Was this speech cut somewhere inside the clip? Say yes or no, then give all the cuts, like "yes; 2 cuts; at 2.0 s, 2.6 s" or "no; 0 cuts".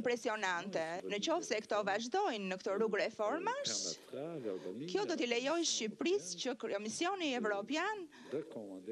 yes; 1 cut; at 1.0 s